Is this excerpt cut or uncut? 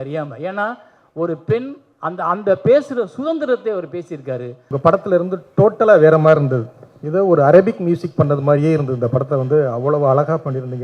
cut